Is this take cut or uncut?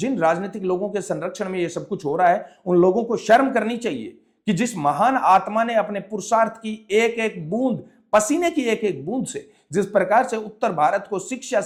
uncut